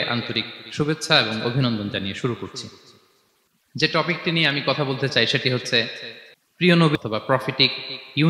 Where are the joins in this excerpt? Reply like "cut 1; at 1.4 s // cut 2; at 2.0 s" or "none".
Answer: cut 1; at 6.9 s